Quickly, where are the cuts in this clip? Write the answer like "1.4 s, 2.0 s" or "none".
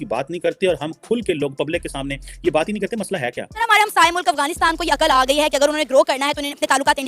3.7 s